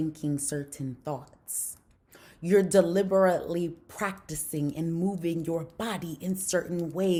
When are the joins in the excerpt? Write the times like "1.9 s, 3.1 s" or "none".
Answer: none